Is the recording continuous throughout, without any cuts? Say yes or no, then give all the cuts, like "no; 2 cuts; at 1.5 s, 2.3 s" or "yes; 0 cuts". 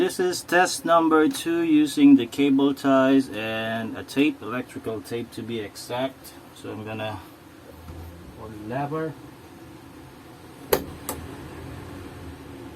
no; 1 cut; at 7.7 s